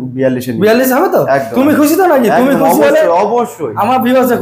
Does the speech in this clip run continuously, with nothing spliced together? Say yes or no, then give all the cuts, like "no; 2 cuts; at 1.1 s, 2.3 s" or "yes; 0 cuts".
yes; 0 cuts